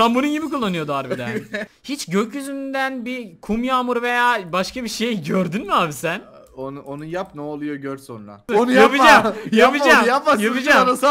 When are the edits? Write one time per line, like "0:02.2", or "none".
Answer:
0:01.7
0:08.5